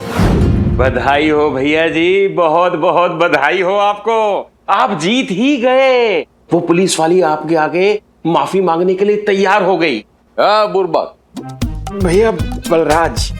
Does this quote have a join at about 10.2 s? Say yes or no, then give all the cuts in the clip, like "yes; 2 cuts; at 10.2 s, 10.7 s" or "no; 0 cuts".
yes; 1 cut; at 10.2 s